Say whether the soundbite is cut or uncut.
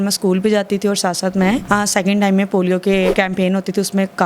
cut